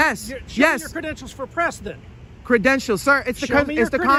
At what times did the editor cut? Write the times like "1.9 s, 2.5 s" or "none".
none